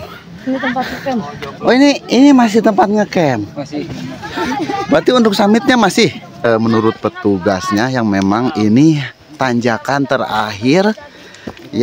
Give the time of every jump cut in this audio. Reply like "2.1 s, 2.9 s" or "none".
6.4 s